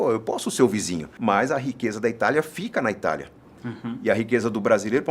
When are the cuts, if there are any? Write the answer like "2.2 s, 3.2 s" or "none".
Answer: 1.0 s